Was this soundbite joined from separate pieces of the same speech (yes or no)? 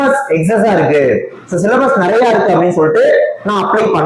no